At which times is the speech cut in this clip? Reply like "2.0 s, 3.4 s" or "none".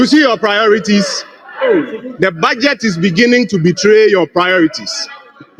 none